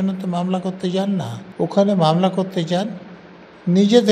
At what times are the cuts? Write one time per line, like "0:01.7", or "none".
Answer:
0:01.4